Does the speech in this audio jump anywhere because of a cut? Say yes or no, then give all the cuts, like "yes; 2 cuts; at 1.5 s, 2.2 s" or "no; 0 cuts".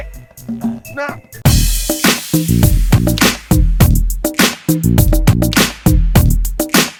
no; 0 cuts